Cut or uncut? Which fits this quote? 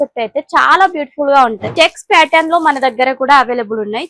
cut